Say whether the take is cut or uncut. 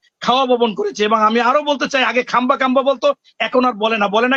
uncut